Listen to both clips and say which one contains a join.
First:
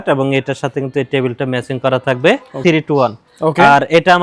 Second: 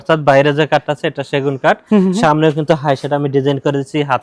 first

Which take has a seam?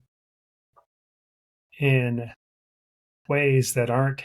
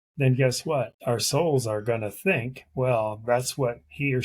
second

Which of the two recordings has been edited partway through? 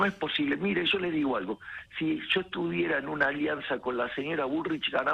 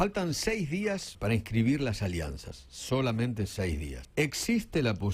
second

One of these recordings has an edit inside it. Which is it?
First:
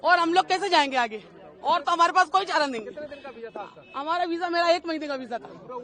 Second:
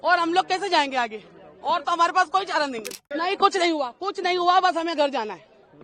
second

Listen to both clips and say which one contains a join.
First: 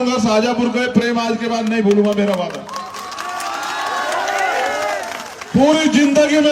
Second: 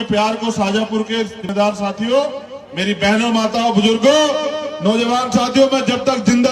second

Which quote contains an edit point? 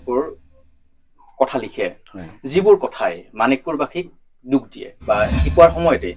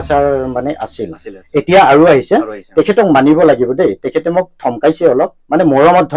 first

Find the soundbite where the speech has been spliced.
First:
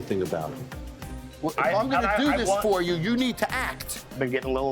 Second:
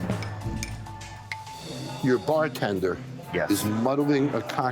second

